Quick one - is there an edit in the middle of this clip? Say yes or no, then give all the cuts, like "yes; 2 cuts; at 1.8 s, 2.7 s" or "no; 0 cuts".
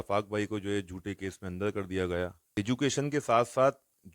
yes; 1 cut; at 2.4 s